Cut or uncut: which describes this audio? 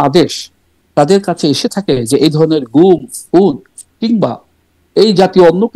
uncut